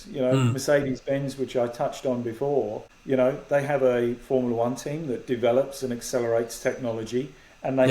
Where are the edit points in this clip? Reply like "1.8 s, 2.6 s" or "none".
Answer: 2.9 s